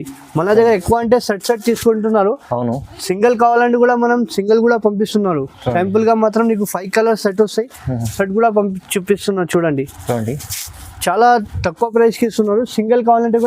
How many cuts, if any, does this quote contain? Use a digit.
0